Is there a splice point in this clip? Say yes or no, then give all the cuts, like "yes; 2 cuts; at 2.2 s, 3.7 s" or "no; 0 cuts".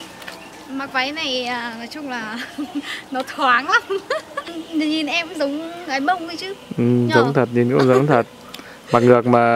yes; 1 cut; at 4.6 s